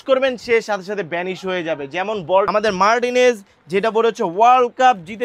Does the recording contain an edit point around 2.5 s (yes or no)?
yes